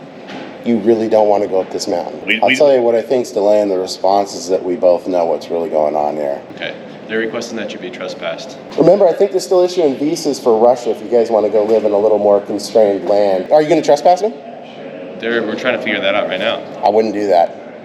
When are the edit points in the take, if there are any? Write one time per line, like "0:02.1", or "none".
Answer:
0:02.3
0:06.5
0:08.6
0:13.4